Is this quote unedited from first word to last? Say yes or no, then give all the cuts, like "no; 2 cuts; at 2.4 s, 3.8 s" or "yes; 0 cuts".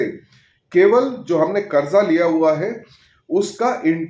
yes; 0 cuts